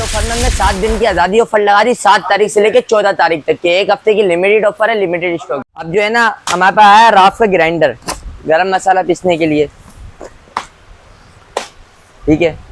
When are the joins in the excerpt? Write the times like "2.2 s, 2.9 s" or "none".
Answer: 5.5 s